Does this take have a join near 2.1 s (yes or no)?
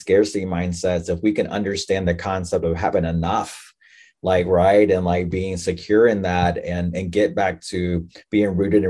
no